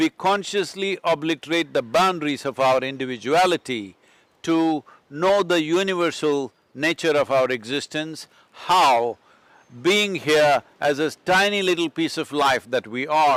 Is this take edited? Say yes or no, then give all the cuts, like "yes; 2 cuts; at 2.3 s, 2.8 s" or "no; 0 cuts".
no; 0 cuts